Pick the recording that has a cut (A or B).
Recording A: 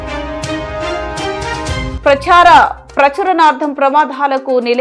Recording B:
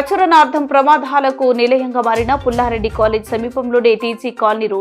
A